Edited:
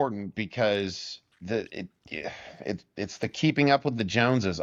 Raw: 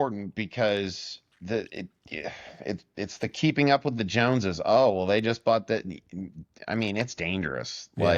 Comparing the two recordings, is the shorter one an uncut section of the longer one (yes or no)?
yes